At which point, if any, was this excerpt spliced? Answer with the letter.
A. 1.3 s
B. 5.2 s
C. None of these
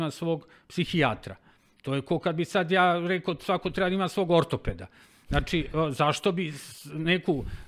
C